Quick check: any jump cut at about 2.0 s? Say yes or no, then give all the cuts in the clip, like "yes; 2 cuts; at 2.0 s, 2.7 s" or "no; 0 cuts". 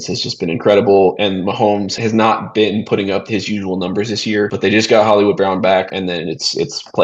yes; 3 cuts; at 2.0 s, 4.5 s, 5.9 s